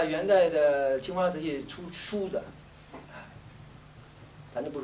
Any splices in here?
no; 0 cuts

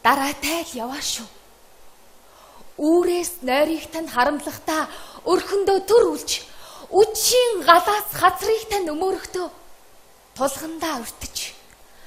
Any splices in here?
yes; 1 cut; at 2.3 s

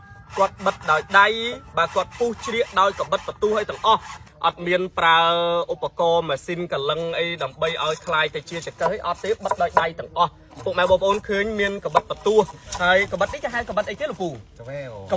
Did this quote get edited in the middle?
yes; 1 cut; at 4.2 s

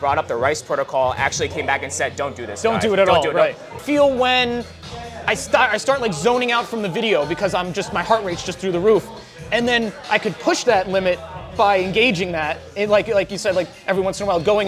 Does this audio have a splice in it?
yes; 1 cut; at 3.7 s

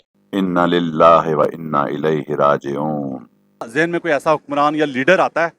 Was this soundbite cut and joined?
yes; 1 cut; at 3.6 s

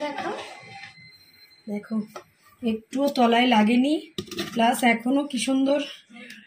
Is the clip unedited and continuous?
yes; 0 cuts

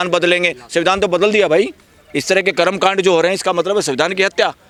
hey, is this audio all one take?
yes; 0 cuts

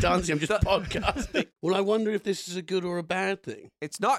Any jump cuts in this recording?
yes; 1 cut; at 1.5 s

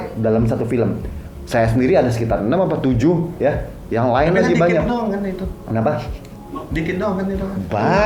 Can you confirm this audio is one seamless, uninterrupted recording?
yes; 0 cuts

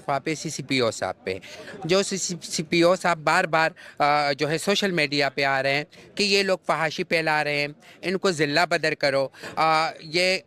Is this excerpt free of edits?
yes; 0 cuts

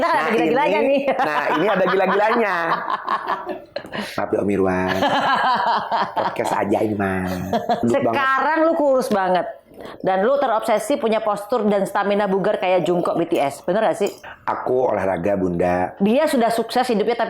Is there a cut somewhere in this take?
yes; 3 cuts; at 7.8 s, 14.3 s, 15.9 s

